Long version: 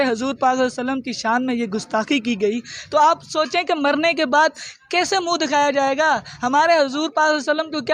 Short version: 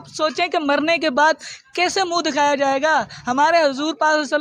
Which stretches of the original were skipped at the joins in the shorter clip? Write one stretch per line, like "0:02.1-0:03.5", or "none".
none